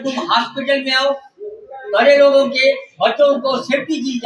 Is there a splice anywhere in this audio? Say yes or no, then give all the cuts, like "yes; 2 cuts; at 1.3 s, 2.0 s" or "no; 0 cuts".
no; 0 cuts